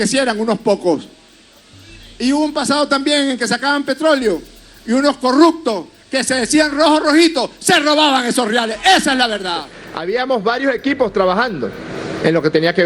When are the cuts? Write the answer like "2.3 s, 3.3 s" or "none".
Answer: 9.8 s